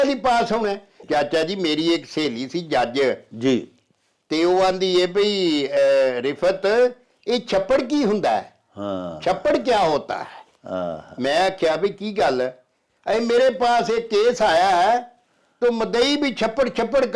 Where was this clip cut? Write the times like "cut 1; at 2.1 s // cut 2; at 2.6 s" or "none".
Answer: cut 1; at 1.0 s